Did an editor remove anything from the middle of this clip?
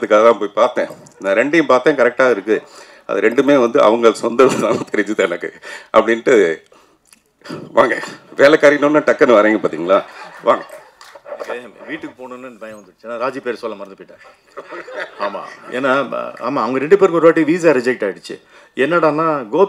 no; 0 cuts

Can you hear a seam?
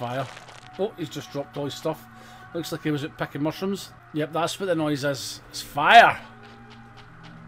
yes; 1 cut; at 3.9 s

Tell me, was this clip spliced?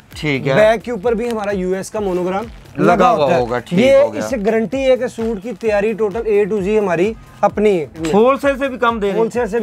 yes; 1 cut; at 8.0 s

